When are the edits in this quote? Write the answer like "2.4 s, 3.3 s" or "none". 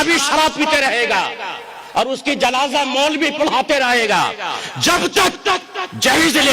none